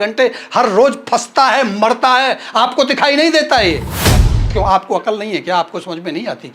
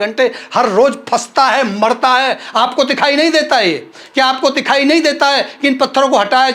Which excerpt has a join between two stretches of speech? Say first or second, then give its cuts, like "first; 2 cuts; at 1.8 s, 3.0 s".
first; 1 cut; at 4.0 s